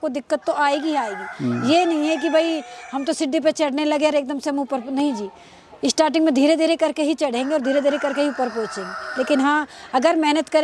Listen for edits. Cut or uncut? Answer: uncut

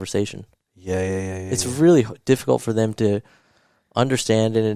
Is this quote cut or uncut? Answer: uncut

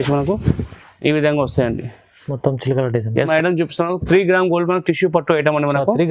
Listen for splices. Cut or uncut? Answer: cut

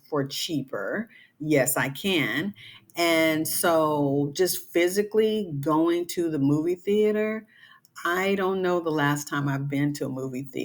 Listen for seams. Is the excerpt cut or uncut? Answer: uncut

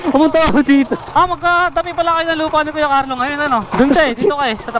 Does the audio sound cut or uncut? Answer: cut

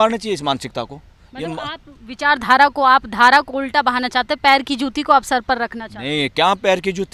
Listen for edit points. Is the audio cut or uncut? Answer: uncut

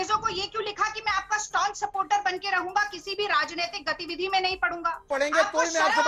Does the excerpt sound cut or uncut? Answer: cut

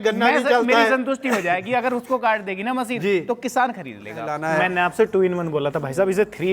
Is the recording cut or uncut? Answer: cut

